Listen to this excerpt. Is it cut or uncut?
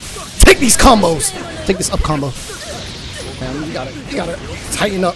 cut